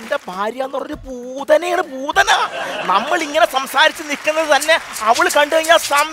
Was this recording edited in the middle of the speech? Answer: no; 0 cuts

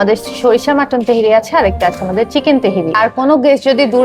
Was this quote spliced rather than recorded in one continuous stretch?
yes; 1 cut; at 3.1 s

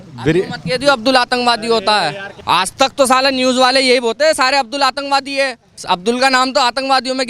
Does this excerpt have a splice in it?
yes; 2 cuts; at 2.3 s, 5.7 s

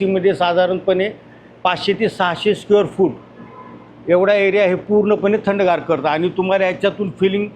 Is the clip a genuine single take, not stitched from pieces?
yes; 0 cuts

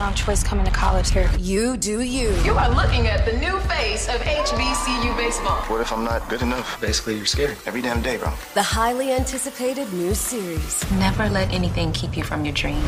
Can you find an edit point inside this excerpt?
no; 0 cuts

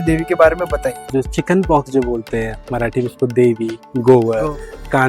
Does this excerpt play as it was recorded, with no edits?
no; 1 cut; at 1.0 s

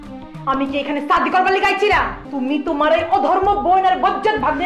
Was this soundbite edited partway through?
yes; 1 cut; at 2.2 s

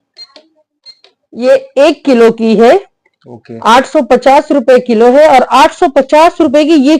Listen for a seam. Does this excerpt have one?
no; 0 cuts

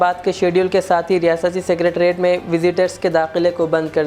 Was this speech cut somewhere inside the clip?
no; 0 cuts

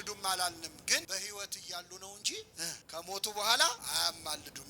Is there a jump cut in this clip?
yes; 3 cuts; at 1.1 s, 2.8 s, 3.8 s

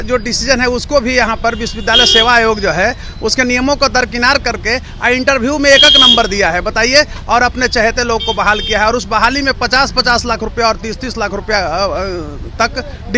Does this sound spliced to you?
no; 0 cuts

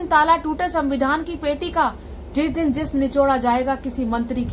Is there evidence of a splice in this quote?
no; 0 cuts

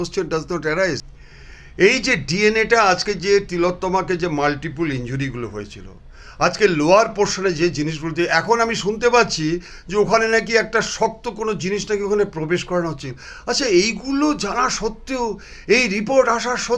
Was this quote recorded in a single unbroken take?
no; 1 cut; at 1.0 s

